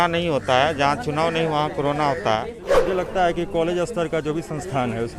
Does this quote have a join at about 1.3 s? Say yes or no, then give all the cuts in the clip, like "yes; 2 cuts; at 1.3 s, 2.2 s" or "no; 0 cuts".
no; 1 cut; at 2.6 s